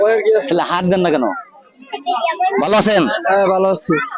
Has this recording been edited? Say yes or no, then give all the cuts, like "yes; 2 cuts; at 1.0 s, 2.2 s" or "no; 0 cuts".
no; 0 cuts